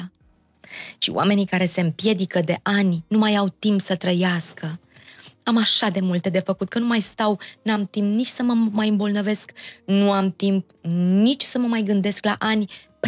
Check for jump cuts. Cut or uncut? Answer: uncut